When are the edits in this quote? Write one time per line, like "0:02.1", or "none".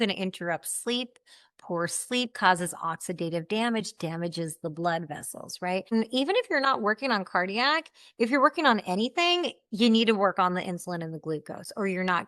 0:05.9